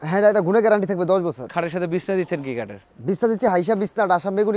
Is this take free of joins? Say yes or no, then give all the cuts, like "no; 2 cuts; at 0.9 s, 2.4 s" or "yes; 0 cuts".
yes; 0 cuts